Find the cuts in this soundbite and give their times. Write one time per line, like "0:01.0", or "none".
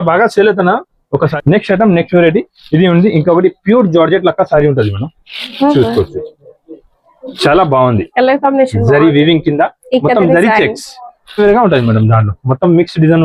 0:01.3
0:11.4